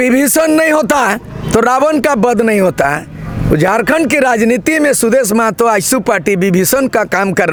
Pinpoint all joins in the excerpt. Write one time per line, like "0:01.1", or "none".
none